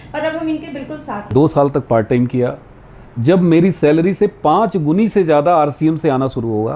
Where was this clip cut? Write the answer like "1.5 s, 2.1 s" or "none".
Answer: 1.2 s